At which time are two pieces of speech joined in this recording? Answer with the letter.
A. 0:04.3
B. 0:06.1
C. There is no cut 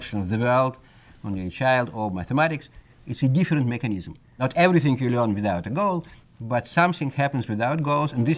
A